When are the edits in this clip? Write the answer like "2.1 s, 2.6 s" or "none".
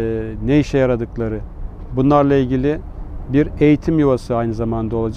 none